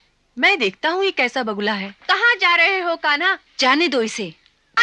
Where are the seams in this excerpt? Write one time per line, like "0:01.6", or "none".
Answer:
0:03.5